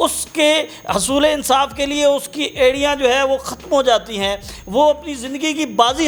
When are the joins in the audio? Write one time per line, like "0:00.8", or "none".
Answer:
none